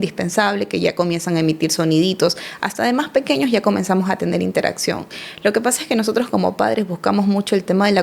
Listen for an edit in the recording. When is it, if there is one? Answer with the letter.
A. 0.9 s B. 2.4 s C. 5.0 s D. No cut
D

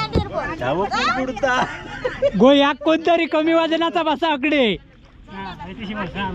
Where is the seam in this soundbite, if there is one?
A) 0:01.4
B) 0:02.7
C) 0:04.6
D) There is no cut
D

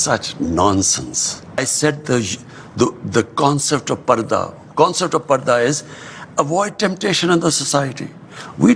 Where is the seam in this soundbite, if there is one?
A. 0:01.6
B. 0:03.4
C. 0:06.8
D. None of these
A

